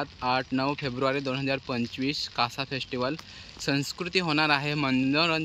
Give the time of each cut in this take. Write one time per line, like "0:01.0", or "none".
none